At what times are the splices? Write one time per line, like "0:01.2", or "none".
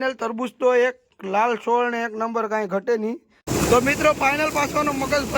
0:03.3